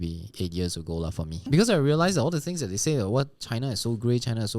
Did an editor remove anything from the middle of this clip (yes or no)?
yes